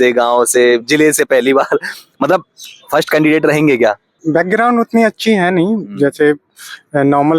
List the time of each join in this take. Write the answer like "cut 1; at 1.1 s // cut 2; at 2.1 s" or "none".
cut 1; at 4.1 s